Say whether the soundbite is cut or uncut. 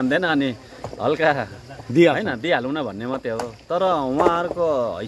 uncut